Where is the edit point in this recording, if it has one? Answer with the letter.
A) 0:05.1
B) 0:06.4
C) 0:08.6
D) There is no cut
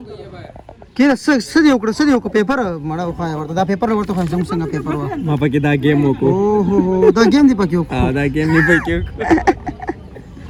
D